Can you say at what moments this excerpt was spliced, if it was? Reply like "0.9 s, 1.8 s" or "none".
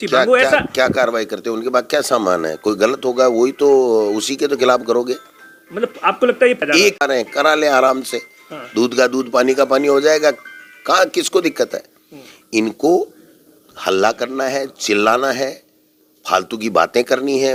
none